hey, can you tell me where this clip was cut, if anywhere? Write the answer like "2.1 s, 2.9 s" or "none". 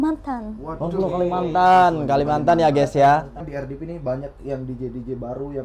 3.4 s